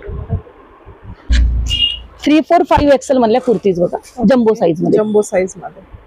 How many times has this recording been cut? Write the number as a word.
one